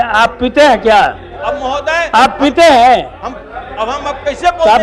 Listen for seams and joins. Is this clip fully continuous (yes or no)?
yes